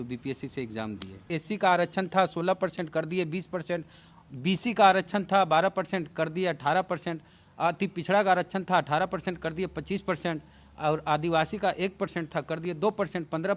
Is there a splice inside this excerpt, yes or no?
yes